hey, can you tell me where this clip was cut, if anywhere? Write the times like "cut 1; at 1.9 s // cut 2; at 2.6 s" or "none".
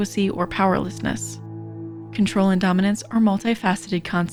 none